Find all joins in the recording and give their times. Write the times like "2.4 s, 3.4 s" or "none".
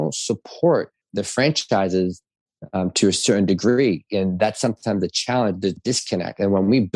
1.1 s, 5.8 s